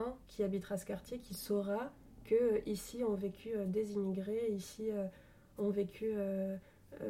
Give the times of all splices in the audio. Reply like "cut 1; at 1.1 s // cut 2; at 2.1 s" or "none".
none